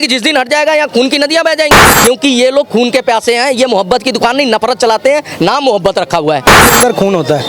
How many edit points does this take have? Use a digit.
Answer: 2